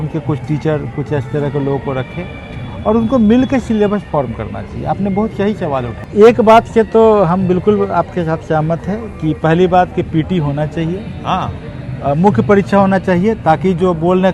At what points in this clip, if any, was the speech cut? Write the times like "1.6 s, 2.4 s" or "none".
6.0 s